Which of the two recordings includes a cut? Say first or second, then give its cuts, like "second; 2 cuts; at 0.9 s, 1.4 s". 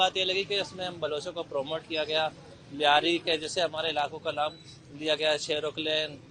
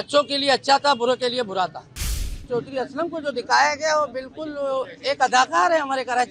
second; 1 cut; at 2.3 s